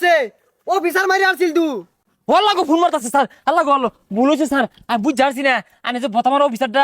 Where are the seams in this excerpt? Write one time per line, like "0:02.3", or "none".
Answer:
0:02.0